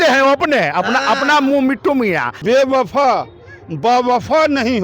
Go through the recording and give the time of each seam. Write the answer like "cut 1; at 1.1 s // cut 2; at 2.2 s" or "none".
cut 1; at 2.4 s